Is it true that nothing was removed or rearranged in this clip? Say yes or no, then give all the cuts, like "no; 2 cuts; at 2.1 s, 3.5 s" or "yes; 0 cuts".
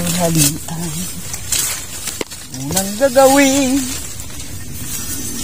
yes; 0 cuts